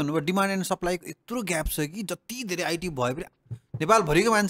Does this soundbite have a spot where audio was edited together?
no; 0 cuts

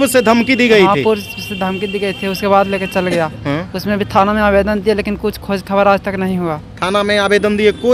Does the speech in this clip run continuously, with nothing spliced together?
yes; 0 cuts

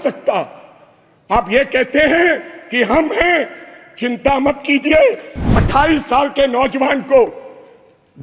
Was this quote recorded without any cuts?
no; 1 cut; at 5.6 s

